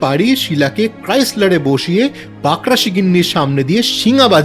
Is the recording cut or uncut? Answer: uncut